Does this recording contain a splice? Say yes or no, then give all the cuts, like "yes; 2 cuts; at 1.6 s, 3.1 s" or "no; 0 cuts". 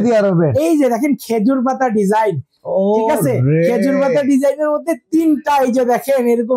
no; 0 cuts